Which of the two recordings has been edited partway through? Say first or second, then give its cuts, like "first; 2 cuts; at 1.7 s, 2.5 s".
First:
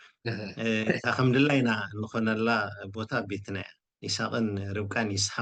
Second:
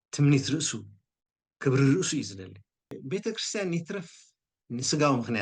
second; 1 cut; at 3.0 s